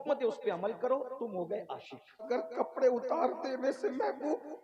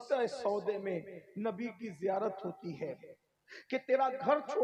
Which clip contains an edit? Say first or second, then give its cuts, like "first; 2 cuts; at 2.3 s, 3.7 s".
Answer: first; 1 cut; at 2.3 s